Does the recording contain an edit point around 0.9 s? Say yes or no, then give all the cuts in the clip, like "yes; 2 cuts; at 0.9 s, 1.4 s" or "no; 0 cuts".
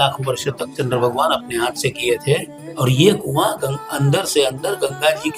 no; 1 cut; at 2.6 s